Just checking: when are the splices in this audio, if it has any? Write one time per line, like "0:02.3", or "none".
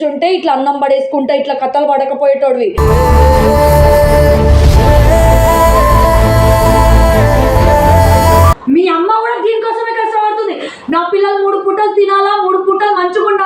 0:08.5